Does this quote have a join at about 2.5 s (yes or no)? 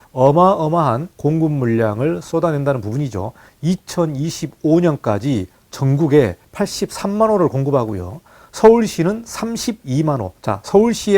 no